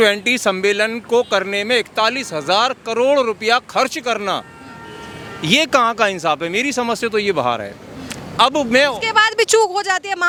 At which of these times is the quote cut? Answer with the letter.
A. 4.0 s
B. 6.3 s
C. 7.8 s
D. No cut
D